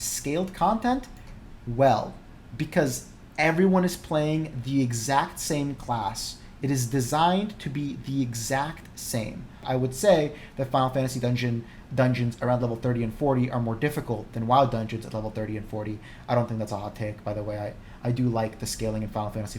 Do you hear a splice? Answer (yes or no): yes